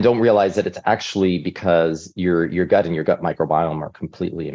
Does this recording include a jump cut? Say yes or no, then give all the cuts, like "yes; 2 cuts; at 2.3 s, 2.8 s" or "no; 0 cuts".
no; 0 cuts